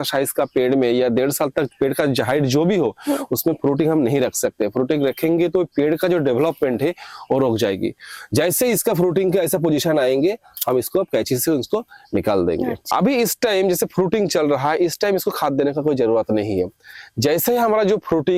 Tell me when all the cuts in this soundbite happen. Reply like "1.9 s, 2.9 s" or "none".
12.8 s